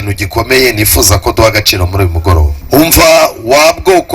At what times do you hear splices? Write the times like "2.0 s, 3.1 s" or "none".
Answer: 2.5 s

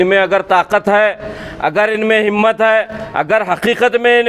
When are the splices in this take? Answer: none

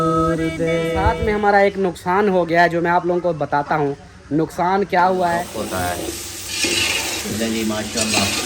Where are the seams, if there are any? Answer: 1.2 s, 5.5 s

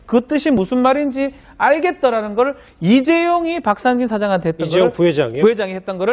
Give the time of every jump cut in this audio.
2.0 s

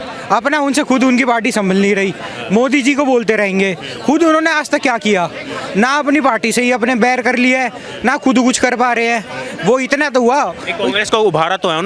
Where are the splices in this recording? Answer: none

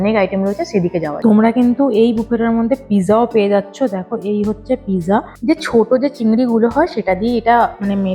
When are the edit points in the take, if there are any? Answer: 1.1 s, 5.3 s

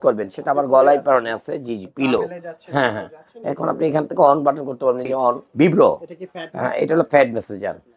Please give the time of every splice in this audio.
5.4 s

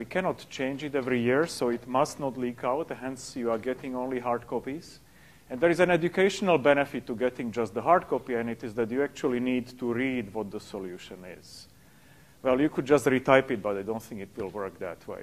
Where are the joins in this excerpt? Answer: none

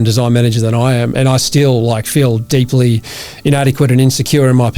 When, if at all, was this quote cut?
1.1 s

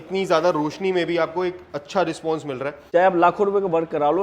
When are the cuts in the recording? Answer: 2.8 s

